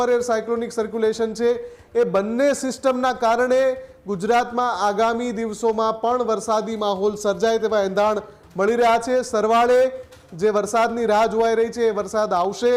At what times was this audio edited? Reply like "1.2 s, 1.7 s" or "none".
none